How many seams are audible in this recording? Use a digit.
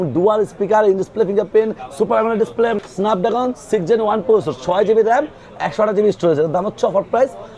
1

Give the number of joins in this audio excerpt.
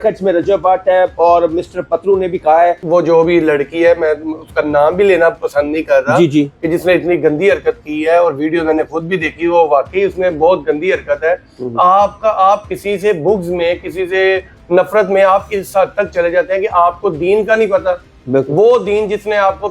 1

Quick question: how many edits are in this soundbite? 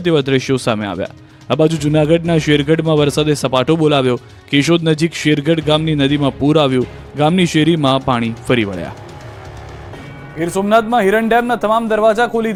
0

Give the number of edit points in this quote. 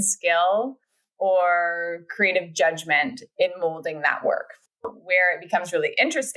1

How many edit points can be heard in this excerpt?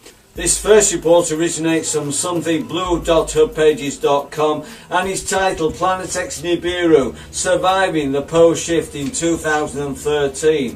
1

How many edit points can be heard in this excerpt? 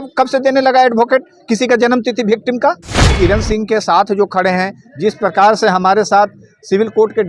1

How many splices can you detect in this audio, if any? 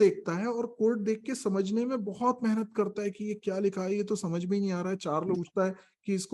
1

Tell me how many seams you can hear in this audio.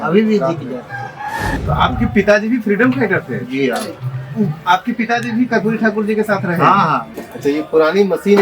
2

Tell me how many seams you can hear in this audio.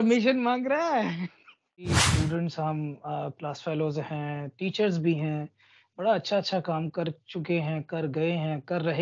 1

